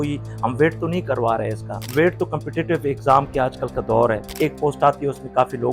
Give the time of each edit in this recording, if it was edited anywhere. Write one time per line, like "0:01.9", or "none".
0:01.7
0:04.3